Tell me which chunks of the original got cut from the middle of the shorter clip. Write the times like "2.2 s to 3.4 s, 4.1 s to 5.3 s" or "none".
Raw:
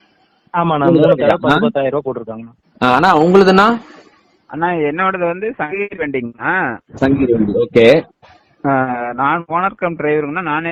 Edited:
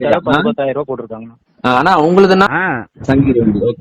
3.6 s to 6.4 s